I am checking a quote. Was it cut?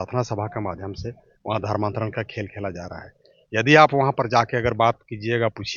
no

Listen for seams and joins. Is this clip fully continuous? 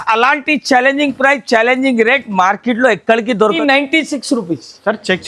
no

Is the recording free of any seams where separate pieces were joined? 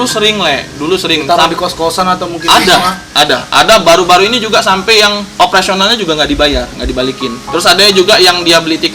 no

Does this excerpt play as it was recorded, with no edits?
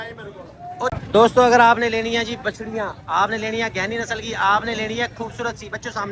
no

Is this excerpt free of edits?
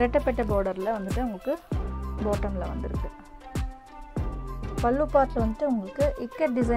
no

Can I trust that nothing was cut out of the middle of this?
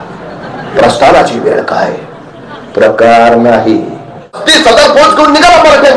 no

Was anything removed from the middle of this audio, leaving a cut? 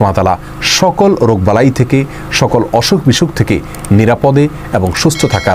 no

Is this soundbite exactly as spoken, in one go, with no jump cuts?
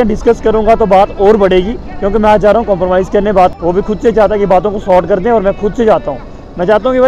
no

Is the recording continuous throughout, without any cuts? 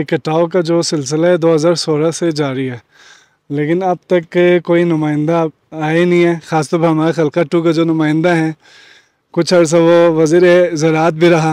yes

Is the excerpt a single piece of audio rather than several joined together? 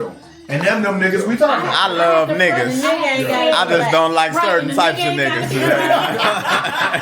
yes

